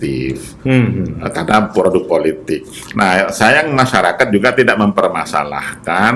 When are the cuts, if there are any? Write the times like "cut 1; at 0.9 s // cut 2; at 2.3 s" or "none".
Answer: none